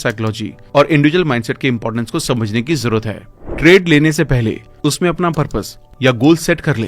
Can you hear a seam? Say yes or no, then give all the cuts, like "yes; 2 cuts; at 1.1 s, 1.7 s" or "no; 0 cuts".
yes; 1 cut; at 3.3 s